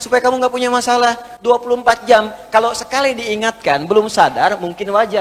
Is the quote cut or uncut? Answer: uncut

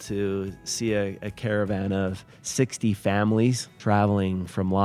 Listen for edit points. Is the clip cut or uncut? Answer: cut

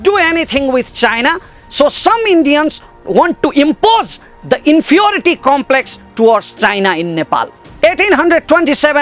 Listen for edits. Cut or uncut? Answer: cut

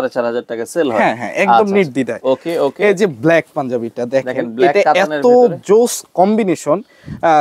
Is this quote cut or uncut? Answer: uncut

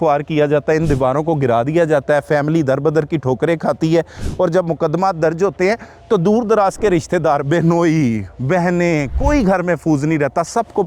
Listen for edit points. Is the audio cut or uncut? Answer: uncut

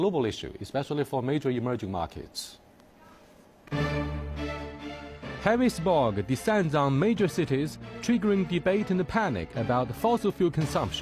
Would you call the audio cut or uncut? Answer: cut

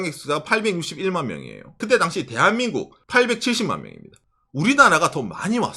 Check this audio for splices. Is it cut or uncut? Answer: cut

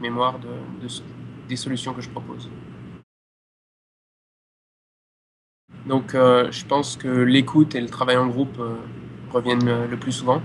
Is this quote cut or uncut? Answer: uncut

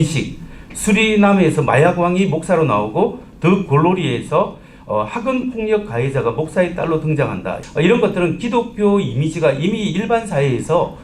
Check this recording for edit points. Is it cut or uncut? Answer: cut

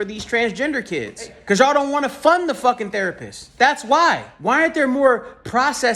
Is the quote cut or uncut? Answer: cut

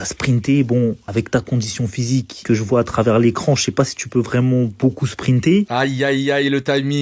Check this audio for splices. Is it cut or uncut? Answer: cut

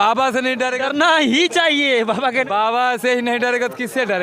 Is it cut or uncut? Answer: cut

